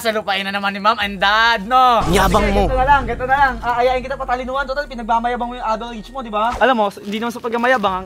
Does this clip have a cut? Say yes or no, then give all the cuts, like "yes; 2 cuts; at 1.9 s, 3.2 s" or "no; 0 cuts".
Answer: yes; 2 cuts; at 2.1 s, 6.5 s